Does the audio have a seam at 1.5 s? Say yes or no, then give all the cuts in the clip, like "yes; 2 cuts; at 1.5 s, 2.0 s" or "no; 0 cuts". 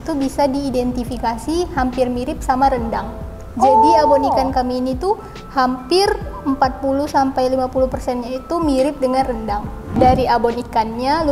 no; 1 cut; at 10.0 s